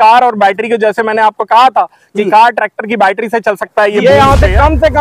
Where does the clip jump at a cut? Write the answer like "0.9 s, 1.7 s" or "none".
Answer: 4.0 s

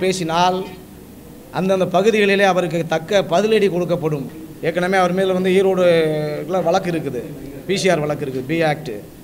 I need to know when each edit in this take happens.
4.2 s

